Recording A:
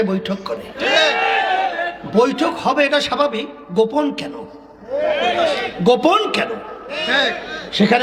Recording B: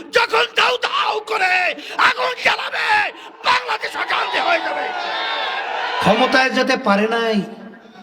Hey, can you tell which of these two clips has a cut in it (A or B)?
B